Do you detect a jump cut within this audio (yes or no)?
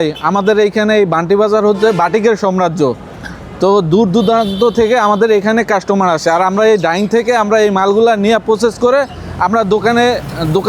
no